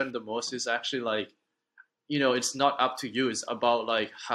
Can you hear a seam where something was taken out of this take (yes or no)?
no